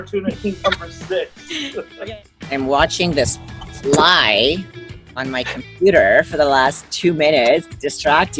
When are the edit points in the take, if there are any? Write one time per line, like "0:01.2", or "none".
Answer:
0:01.9